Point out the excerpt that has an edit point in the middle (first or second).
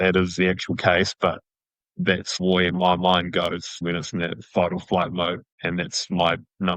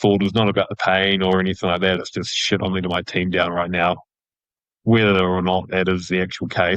first